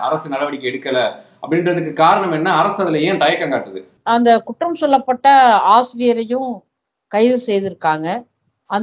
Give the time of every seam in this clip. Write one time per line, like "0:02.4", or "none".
0:03.9